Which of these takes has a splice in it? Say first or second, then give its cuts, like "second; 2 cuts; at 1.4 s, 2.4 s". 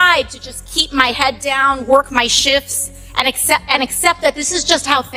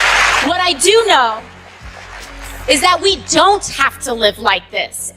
second; 1 cut; at 1.9 s